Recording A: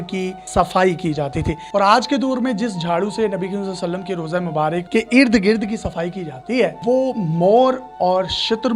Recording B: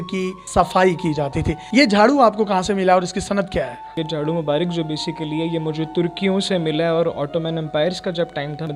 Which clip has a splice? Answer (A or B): A